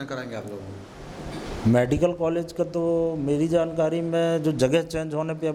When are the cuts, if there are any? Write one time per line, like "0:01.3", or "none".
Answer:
none

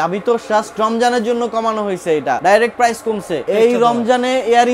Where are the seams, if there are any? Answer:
0:02.4
0:03.4

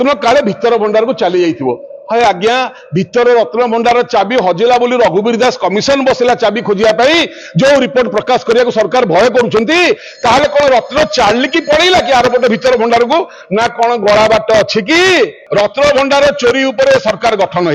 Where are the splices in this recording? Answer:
0:15.4

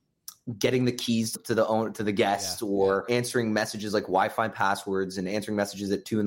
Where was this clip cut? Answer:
0:01.4
0:03.0

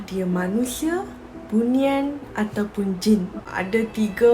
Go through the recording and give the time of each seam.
0:03.4

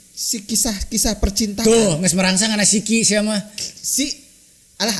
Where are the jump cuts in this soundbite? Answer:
none

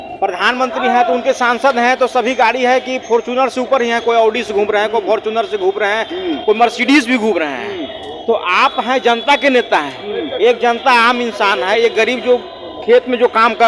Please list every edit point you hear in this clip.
none

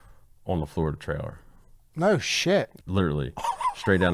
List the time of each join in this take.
0:02.7

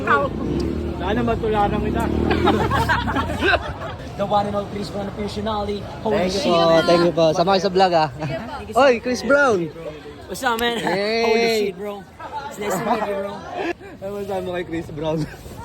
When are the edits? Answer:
0:04.0
0:13.7

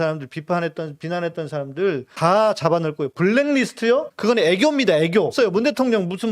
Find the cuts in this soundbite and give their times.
0:05.3

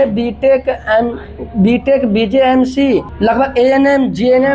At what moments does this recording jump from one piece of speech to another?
0:03.1

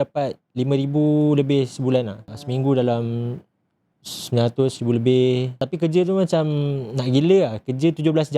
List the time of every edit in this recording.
0:02.3
0:05.6

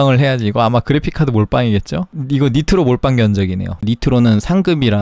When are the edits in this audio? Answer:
0:02.1
0:03.8

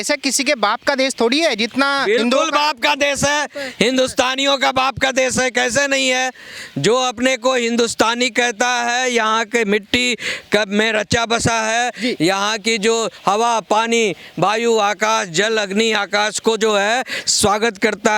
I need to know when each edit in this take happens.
none

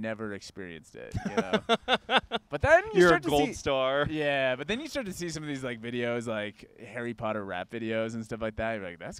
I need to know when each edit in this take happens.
none

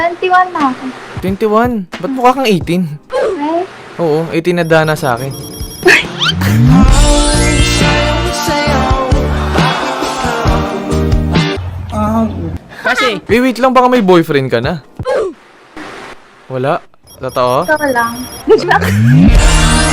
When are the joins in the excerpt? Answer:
0:13.2

